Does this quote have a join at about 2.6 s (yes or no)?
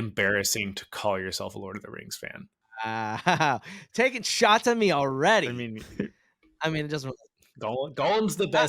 yes